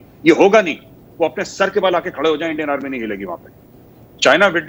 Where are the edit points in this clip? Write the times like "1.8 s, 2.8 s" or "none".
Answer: none